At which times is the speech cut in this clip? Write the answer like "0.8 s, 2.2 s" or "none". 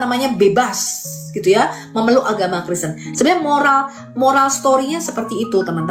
3.1 s